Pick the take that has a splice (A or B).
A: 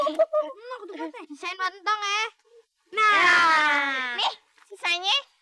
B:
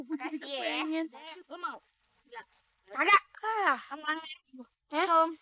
B